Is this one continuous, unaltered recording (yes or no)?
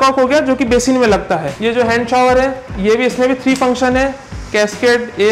no